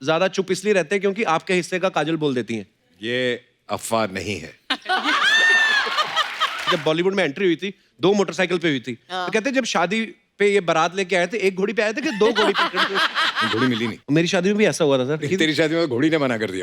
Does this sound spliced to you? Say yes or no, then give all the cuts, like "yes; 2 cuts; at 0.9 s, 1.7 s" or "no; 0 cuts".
yes; 3 cuts; at 6.7 s, 13.7 s, 15.3 s